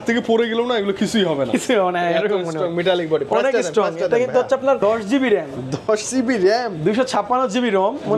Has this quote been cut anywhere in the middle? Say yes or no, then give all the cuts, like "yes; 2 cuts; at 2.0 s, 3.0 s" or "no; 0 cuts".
yes; 1 cut; at 4.8 s